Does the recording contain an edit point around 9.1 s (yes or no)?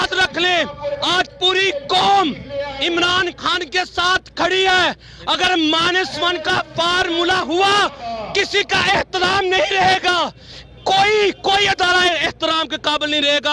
no